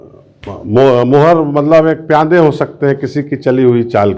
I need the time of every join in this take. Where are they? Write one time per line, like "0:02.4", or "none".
none